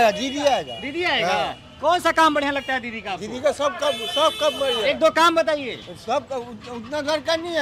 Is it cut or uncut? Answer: uncut